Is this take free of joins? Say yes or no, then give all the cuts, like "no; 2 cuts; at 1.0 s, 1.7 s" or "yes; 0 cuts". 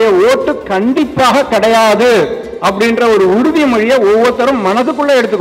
yes; 0 cuts